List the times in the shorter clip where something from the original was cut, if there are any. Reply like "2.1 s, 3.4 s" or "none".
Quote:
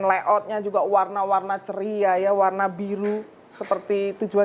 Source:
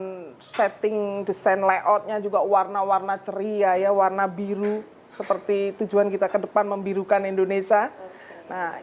none